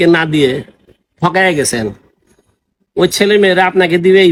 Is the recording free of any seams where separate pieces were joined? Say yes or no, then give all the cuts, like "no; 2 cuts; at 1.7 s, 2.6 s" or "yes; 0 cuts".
yes; 0 cuts